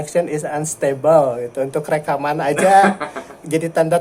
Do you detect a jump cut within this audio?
no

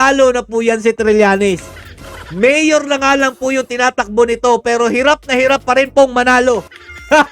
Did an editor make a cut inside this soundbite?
no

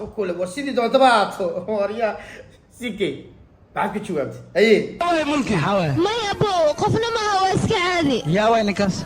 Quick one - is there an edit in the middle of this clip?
no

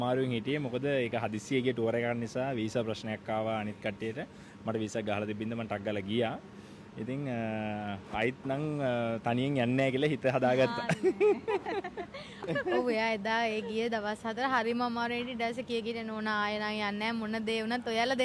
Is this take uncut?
no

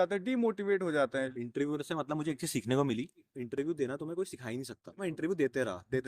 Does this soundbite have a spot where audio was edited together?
yes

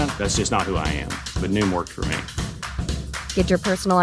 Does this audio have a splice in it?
no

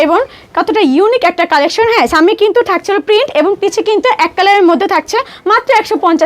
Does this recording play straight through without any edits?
yes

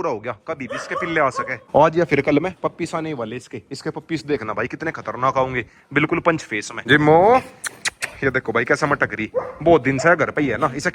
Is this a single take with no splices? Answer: yes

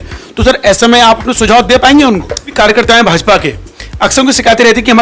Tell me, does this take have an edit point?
yes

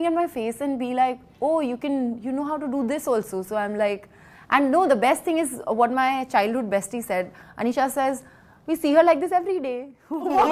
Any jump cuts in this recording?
no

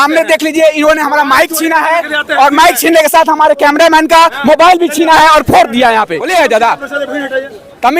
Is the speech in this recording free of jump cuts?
no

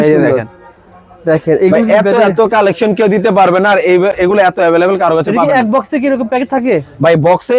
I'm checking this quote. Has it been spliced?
no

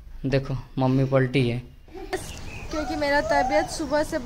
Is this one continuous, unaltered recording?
no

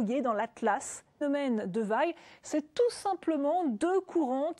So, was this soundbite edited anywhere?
no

